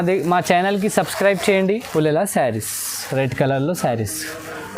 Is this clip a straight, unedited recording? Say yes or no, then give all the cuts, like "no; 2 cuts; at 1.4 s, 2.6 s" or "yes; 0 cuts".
no; 1 cut; at 1.9 s